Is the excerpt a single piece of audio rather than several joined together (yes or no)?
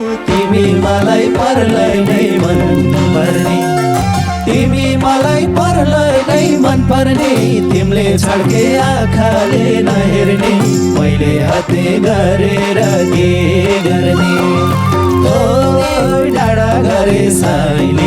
yes